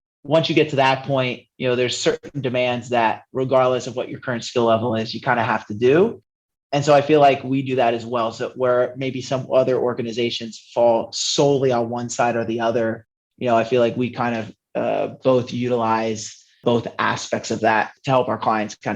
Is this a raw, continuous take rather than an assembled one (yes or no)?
no